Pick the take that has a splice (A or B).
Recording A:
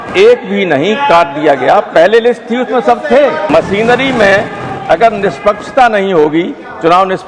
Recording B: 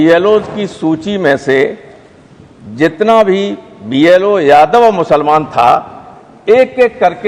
A